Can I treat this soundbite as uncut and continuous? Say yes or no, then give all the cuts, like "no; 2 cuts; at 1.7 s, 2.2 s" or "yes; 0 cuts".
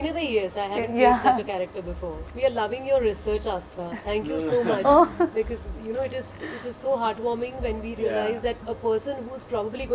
no; 1 cut; at 2.2 s